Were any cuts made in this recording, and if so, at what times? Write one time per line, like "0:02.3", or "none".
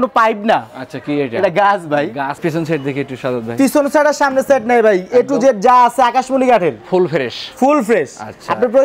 0:02.4

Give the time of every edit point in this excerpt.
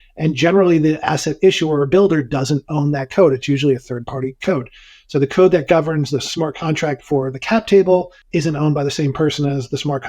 0:06.3
0:08.2

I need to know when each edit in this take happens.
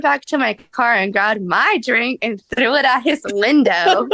none

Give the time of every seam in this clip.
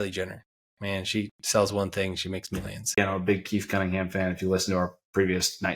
0:03.0

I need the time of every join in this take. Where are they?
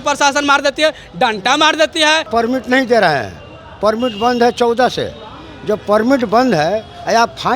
0:02.3

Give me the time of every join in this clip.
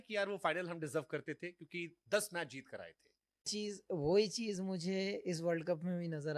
0:03.5

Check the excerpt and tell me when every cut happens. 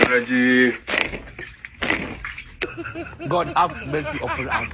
0:02.7

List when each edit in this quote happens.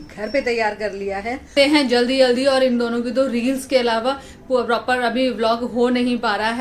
0:01.5

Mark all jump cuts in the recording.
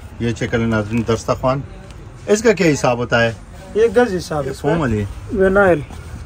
0:04.6

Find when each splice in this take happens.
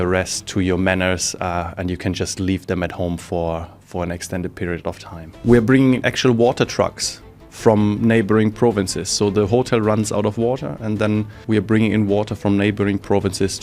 0:05.4
0:11.4

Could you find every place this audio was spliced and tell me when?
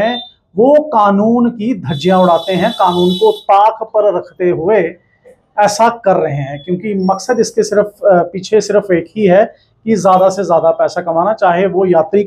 none

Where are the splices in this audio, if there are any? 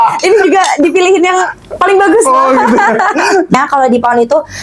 0:03.5

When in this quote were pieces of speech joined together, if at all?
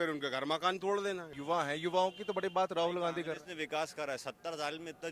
0:01.3

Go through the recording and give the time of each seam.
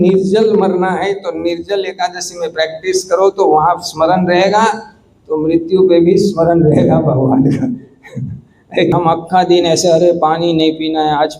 0:08.9

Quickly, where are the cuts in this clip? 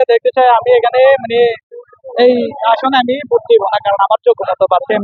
none

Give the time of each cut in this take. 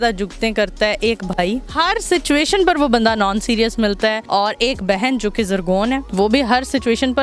0:04.2
0:06.1

